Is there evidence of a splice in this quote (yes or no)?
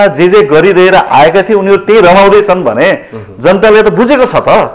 no